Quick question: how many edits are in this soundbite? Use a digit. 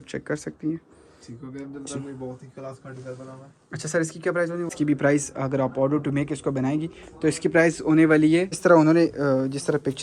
2